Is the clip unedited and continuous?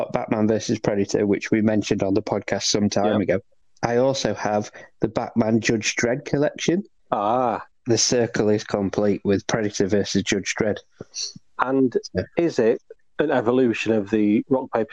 yes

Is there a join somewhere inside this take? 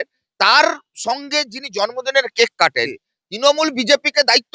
yes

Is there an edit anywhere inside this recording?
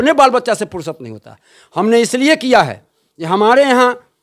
no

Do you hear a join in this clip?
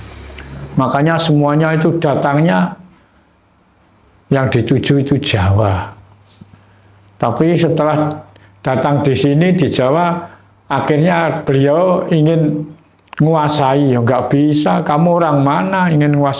no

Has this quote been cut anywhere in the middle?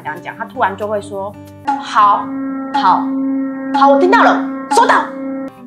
no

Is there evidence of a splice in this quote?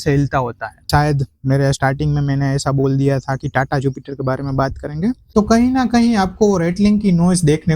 yes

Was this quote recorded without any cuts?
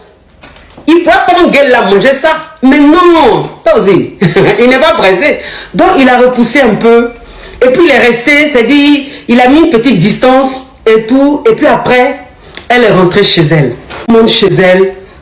no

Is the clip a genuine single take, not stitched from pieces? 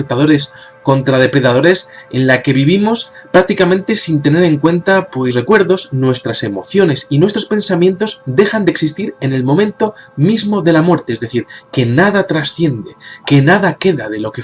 yes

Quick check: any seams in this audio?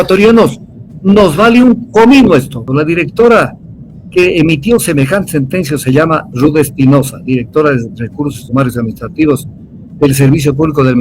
yes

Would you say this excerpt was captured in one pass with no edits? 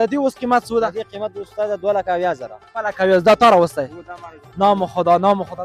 yes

